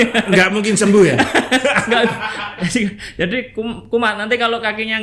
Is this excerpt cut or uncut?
uncut